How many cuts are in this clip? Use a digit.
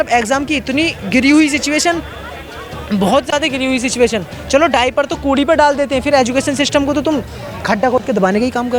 0